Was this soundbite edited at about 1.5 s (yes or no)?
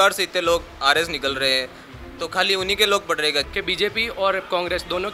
no